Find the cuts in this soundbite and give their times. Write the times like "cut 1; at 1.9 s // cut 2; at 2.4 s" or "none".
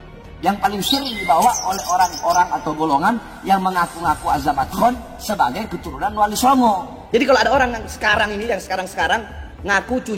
cut 1; at 6.9 s